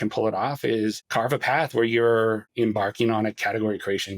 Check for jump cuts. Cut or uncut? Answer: cut